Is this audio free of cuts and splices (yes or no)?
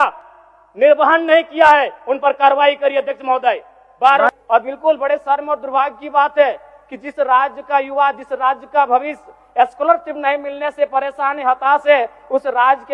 no